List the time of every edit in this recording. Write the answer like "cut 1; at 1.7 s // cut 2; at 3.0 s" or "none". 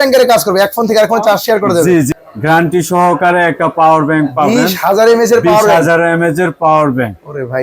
cut 1; at 2.1 s